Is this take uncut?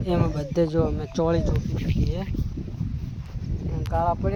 yes; 0 cuts

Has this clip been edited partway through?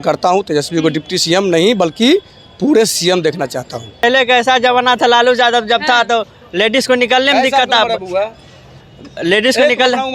yes; 1 cut; at 4.0 s

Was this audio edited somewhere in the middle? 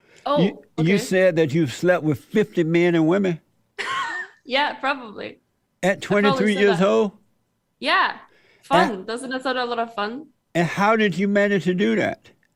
no; 0 cuts

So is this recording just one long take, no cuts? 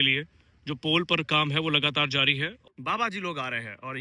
no; 1 cut; at 2.6 s

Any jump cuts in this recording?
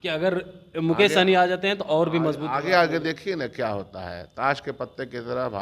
no; 0 cuts

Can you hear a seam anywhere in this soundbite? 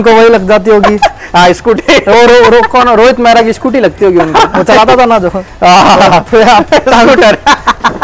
no; 0 cuts

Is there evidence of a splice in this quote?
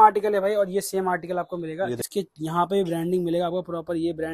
yes; 1 cut; at 2.0 s

